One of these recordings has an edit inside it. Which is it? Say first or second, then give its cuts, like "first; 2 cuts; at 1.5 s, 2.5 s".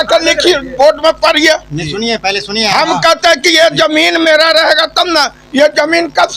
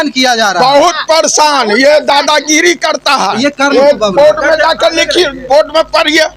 second; 1 cut; at 3.7 s